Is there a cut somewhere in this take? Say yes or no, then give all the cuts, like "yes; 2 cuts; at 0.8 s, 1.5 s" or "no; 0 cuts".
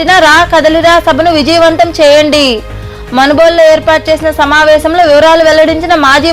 no; 0 cuts